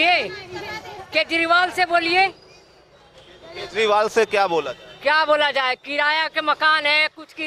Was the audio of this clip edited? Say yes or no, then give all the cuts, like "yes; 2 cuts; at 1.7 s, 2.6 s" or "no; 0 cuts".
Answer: no; 0 cuts